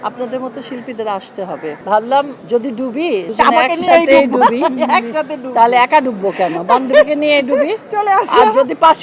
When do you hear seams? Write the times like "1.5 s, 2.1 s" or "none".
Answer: 1.8 s, 2.9 s